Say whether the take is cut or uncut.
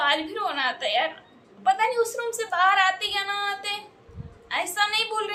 uncut